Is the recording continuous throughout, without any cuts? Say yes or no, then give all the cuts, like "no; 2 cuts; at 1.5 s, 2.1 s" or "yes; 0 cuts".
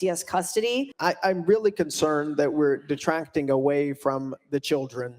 no; 1 cut; at 0.9 s